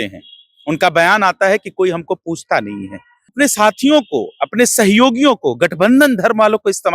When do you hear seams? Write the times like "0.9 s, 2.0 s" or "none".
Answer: 3.3 s